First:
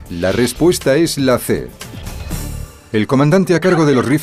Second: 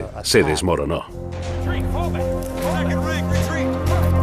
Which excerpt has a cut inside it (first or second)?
first